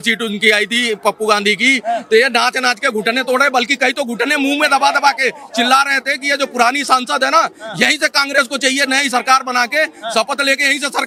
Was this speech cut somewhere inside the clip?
no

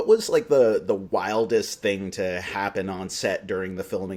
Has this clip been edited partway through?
no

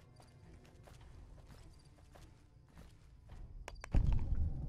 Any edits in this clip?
no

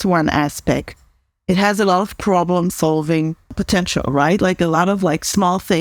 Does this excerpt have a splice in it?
yes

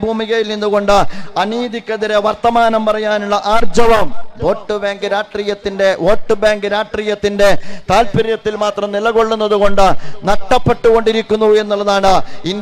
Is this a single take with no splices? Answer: yes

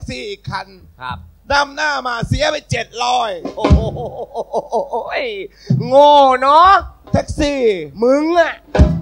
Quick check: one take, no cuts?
yes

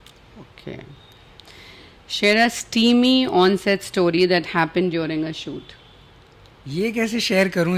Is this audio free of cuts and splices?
yes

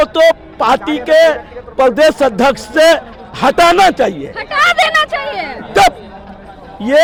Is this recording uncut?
yes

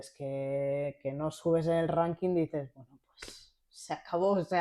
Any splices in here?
no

